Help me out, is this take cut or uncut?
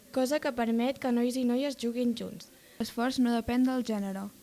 cut